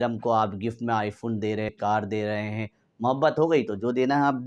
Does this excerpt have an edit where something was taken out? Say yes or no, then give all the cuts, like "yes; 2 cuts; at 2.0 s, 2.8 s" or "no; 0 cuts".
yes; 1 cut; at 1.7 s